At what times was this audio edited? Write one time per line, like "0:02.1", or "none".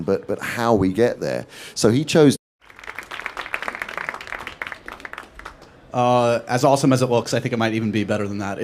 none